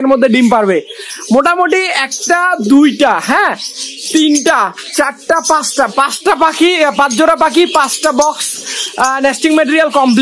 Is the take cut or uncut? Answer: uncut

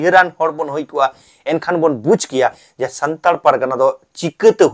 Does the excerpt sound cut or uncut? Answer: uncut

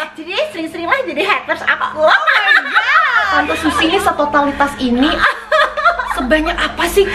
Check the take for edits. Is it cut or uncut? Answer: cut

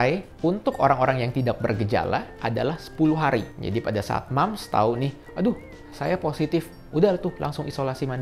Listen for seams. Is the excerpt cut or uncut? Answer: uncut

